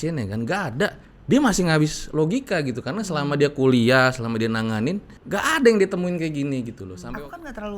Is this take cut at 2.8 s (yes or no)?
no